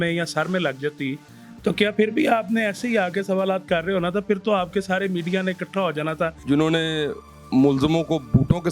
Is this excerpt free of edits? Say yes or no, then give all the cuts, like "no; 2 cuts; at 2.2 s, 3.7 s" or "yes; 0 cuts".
no; 1 cut; at 6.4 s